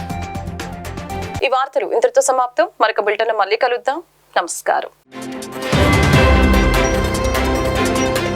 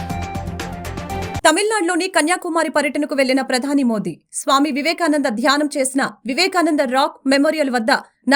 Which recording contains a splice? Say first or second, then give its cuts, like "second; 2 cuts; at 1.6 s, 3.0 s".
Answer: second; 1 cut; at 1.4 s